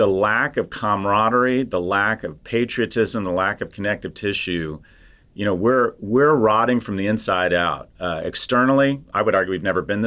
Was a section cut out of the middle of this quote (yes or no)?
yes